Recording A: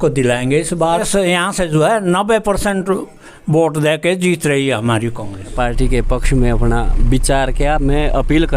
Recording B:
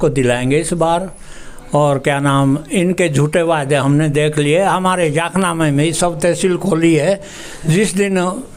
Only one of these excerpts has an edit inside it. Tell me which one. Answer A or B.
A